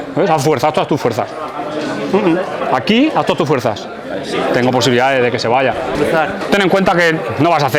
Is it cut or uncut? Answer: cut